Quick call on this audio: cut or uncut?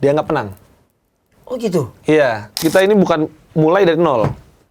cut